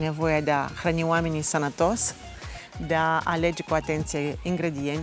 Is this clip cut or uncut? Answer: uncut